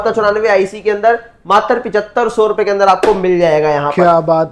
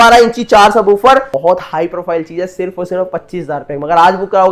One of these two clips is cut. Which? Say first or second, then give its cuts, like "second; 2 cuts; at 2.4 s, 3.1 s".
second; 1 cut; at 1.3 s